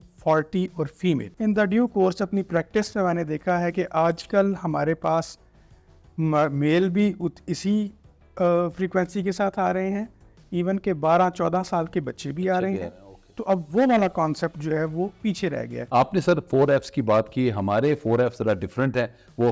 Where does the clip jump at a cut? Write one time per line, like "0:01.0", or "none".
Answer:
0:01.3
0:15.8